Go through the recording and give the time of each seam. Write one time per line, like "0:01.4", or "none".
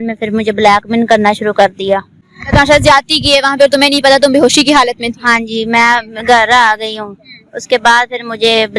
none